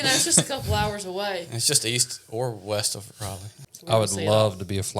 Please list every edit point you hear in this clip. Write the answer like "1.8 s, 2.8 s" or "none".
3.5 s